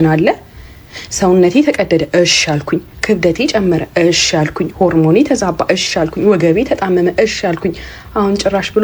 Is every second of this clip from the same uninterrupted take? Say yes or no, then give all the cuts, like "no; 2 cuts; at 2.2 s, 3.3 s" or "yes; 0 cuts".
yes; 0 cuts